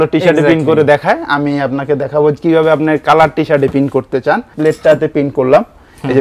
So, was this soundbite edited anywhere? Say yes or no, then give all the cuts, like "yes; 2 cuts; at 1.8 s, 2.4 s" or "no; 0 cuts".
yes; 1 cut; at 4.5 s